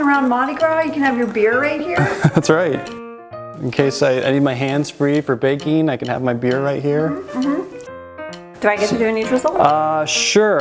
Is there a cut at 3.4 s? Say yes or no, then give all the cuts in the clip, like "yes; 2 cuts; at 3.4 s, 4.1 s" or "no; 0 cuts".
yes; 2 cuts; at 3.4 s, 7.9 s